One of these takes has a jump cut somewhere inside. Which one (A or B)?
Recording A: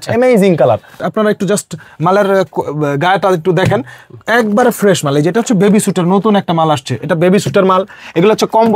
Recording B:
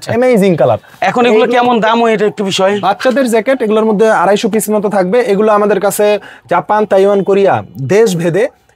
A